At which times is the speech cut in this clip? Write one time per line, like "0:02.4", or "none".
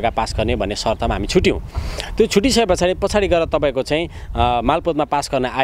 none